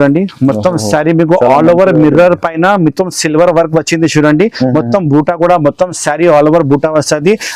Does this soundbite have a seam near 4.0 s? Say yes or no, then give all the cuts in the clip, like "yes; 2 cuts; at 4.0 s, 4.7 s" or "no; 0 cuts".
no; 0 cuts